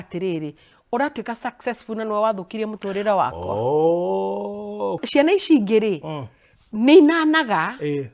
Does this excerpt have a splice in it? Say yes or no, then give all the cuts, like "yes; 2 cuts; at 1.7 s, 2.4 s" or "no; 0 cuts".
yes; 1 cut; at 5.0 s